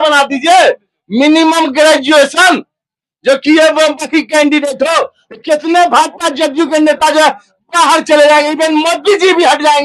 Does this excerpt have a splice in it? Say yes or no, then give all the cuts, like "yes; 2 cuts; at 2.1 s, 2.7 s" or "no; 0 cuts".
no; 0 cuts